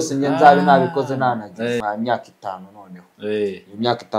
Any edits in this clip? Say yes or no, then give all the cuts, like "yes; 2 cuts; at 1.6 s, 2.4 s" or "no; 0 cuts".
yes; 1 cut; at 1.8 s